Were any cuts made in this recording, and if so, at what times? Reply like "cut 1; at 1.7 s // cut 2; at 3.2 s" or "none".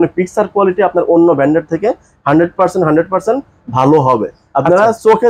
none

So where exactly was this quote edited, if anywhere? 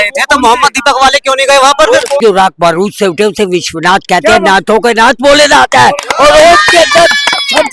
cut 1; at 2.2 s

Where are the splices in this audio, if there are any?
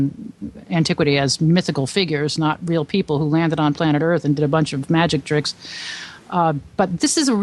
none

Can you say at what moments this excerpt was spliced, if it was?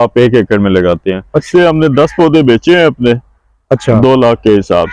cut 1; at 1.4 s

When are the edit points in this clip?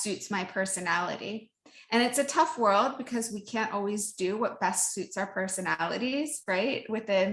none

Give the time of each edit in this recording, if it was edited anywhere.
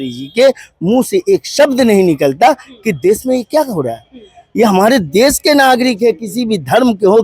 none

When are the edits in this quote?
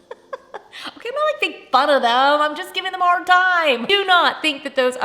cut 1; at 3.9 s

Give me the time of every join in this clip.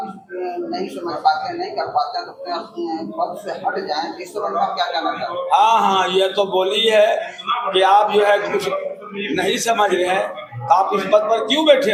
none

